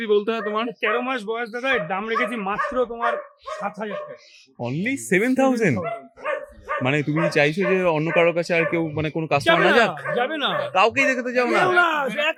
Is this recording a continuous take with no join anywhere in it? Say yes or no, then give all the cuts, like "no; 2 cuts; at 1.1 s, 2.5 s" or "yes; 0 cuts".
yes; 0 cuts